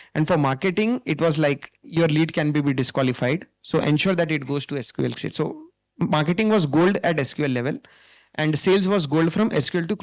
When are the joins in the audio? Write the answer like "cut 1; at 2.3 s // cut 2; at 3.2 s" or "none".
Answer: none